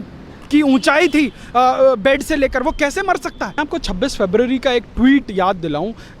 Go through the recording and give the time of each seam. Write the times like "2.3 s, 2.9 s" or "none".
3.5 s